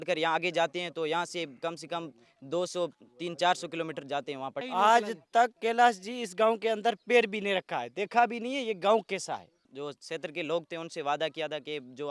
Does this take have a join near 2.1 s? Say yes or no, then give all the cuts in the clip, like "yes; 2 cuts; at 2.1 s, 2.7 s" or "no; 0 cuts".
no; 2 cuts; at 4.7 s, 9.6 s